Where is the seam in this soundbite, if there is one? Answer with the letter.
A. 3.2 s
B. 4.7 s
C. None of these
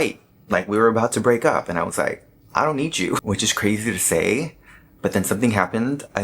A